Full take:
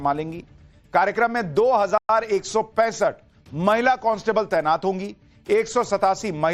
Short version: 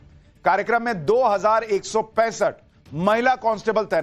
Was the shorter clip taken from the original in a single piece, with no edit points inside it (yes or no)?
no